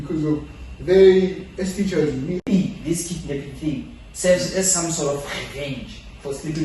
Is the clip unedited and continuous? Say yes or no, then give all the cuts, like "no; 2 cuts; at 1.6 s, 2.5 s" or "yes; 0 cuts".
no; 1 cut; at 2.5 s